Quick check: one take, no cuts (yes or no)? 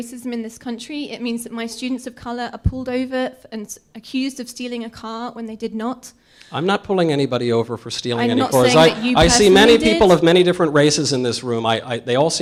yes